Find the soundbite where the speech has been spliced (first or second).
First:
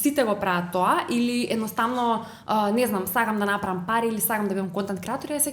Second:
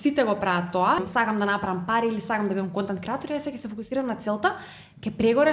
second